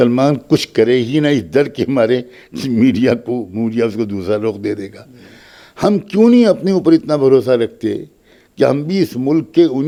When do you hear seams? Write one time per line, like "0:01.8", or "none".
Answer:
none